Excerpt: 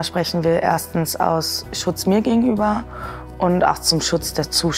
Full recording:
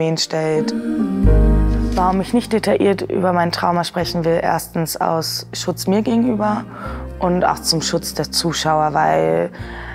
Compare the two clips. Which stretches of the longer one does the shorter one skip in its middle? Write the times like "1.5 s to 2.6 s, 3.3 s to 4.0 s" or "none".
none